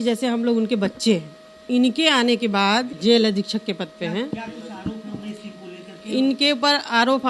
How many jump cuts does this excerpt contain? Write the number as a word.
two